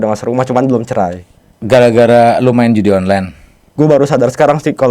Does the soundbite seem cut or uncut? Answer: cut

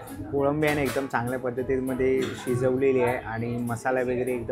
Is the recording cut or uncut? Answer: uncut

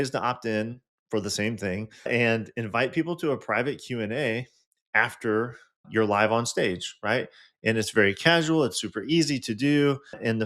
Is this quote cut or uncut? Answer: cut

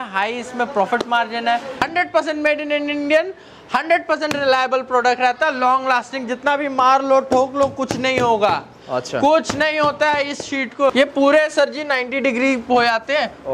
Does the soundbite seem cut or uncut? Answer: cut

